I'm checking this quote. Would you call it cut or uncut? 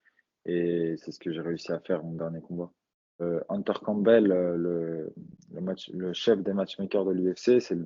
cut